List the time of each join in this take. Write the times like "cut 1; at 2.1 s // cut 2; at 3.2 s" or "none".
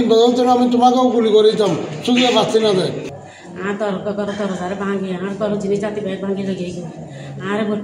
cut 1; at 3.1 s